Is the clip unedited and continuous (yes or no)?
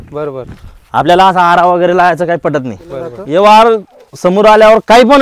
no